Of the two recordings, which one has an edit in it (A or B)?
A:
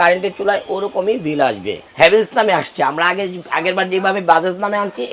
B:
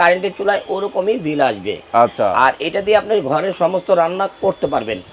A